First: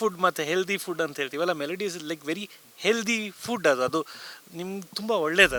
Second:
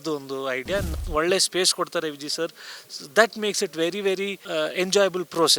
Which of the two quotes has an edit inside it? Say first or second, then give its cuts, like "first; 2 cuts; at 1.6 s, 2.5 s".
second; 2 cuts; at 1.0 s, 4.4 s